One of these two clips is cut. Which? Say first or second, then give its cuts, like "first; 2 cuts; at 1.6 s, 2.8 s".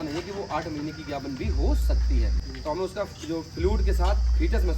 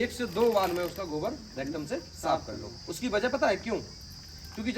first; 1 cut; at 2.5 s